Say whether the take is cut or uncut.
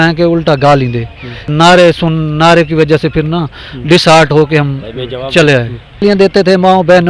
cut